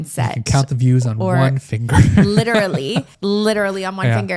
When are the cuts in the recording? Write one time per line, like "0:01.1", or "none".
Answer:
0:03.1